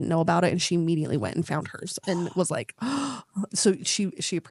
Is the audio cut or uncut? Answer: uncut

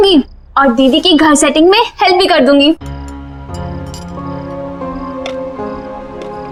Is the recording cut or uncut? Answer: uncut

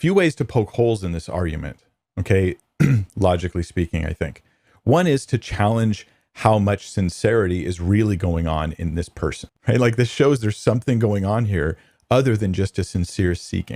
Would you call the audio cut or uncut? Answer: cut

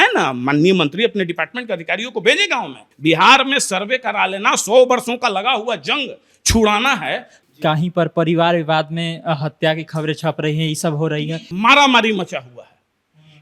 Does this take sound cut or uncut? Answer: cut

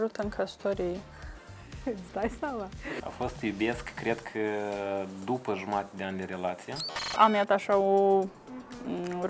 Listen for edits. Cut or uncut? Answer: cut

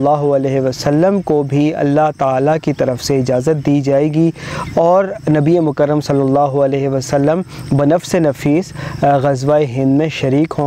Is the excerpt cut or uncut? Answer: uncut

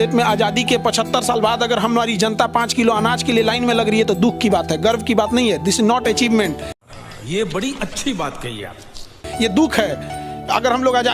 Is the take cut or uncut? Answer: uncut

